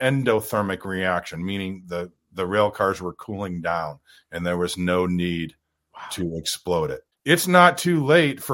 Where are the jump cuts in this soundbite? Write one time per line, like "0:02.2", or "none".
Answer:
0:07.1